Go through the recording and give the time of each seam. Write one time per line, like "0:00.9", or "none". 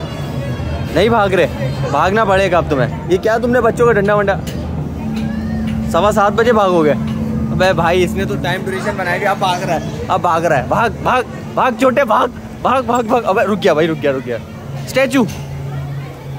none